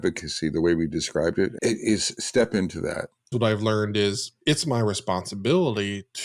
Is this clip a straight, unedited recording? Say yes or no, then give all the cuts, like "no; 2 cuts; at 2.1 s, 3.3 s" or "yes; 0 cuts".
no; 2 cuts; at 1.5 s, 3.3 s